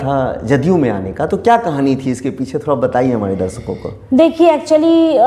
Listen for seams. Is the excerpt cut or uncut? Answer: uncut